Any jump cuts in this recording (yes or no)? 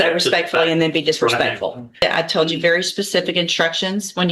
yes